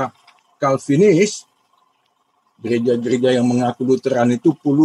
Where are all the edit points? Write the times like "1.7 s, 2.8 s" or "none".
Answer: none